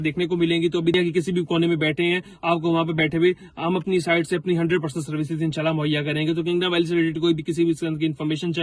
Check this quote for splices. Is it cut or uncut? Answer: cut